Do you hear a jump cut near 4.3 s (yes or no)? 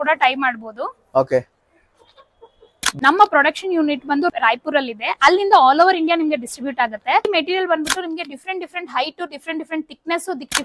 yes